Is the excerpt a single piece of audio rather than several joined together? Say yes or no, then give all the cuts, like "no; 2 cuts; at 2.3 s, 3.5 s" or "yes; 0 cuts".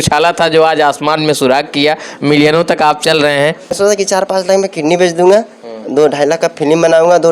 no; 1 cut; at 3.8 s